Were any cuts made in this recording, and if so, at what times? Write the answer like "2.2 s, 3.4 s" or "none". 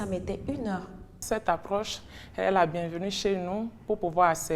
1.2 s